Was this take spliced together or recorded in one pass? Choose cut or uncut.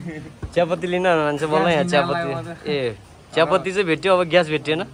uncut